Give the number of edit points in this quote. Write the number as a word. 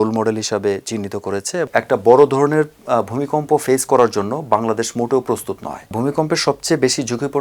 two